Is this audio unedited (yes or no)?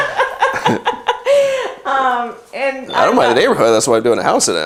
yes